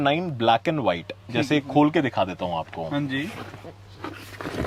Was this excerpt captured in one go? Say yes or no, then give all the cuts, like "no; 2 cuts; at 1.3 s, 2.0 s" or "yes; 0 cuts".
yes; 0 cuts